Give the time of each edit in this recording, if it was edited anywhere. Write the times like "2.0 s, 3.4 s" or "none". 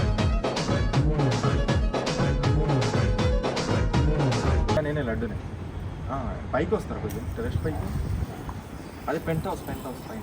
4.8 s